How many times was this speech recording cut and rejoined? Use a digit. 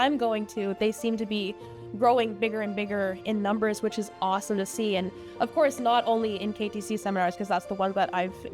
0